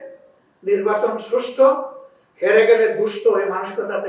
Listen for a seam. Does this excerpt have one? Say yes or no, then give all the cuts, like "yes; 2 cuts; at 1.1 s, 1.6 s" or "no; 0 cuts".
no; 0 cuts